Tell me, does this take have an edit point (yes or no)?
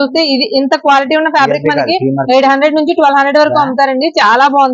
no